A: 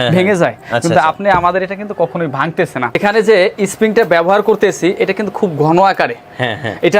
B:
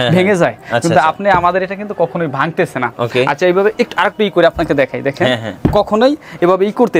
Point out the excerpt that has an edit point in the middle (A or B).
A